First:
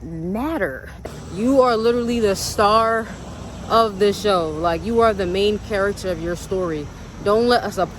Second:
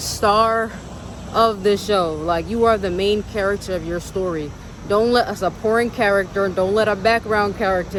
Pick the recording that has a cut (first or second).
first